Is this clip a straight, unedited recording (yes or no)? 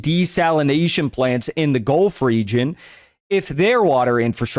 yes